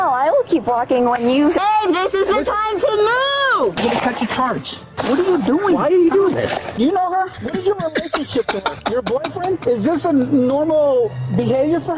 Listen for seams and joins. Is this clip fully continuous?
no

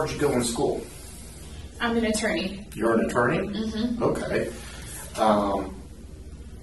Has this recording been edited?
no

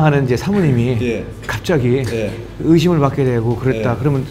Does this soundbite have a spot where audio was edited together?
no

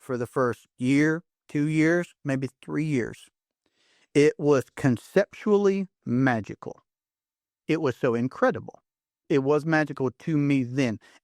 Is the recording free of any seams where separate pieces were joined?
no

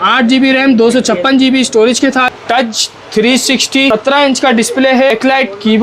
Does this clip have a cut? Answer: yes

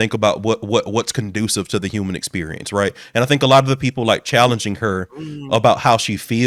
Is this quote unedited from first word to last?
yes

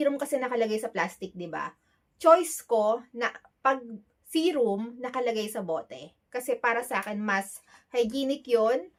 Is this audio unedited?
yes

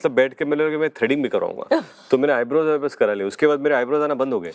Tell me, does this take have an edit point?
no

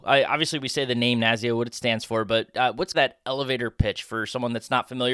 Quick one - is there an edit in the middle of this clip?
yes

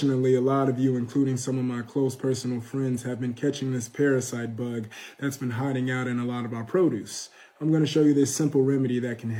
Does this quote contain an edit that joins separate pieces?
no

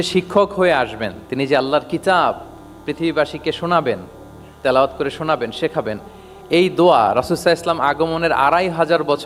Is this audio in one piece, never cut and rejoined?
yes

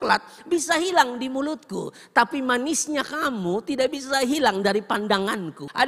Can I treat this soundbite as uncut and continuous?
yes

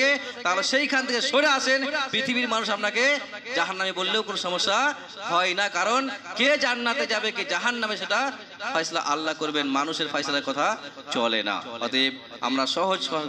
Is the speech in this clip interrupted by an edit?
no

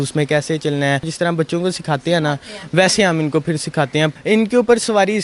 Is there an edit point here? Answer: yes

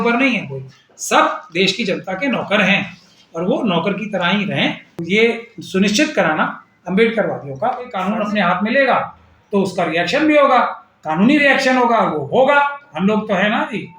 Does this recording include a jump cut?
yes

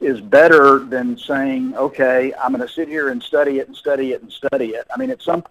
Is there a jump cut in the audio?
no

